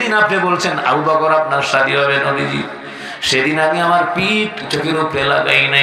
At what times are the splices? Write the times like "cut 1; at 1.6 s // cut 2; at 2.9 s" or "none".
cut 1; at 4.7 s